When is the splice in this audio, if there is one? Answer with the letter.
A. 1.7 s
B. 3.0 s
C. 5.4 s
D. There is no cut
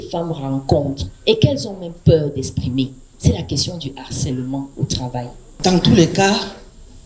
C